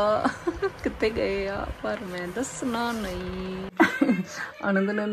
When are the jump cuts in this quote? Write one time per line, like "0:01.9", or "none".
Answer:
0:03.7